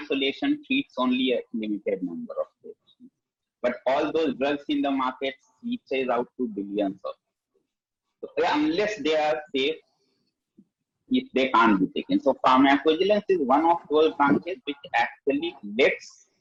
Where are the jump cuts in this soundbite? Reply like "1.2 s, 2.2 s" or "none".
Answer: none